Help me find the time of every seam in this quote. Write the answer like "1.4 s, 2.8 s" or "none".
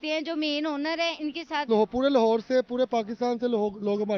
1.6 s